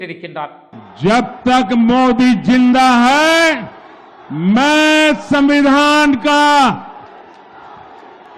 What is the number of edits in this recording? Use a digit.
0